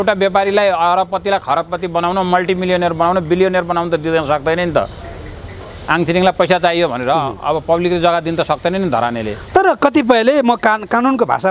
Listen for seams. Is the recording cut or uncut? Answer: uncut